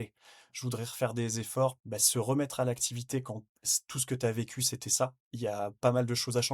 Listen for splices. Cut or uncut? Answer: cut